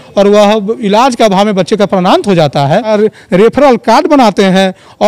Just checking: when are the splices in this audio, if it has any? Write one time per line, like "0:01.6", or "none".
0:02.9